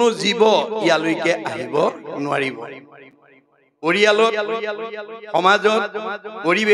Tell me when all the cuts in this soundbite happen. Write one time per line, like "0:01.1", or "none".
none

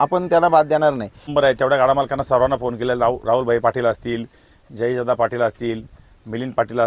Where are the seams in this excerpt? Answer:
0:01.3

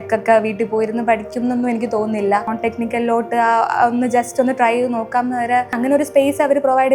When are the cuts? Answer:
0:02.5
0:05.8

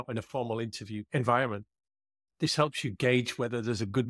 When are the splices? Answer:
0:01.0

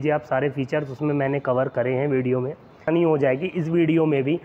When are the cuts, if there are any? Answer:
0:02.9

